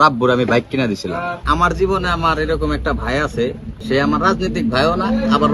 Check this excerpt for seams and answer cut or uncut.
cut